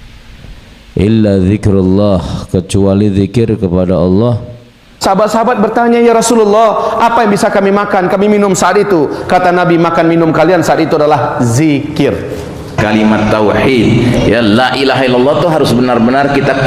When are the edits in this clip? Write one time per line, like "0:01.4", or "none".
0:04.9
0:12.8